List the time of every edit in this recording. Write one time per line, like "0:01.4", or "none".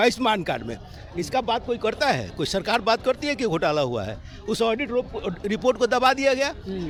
none